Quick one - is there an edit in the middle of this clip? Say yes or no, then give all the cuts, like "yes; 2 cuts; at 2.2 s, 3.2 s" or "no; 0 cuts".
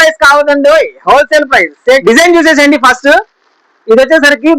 yes; 1 cut; at 2.0 s